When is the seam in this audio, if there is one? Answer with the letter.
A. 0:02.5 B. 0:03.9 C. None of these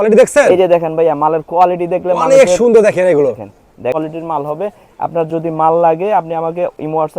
B